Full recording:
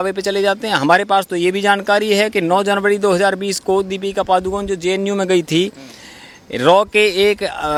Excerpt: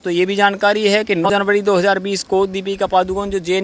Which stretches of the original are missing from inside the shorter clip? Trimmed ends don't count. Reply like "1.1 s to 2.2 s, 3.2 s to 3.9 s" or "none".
2.5 s to 2.6 s